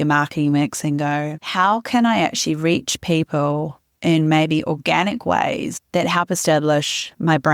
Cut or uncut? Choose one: uncut